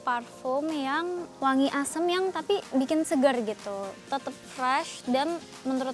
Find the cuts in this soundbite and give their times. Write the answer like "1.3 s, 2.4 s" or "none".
1.3 s